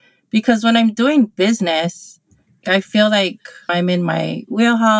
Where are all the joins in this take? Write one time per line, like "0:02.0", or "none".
0:02.6
0:03.7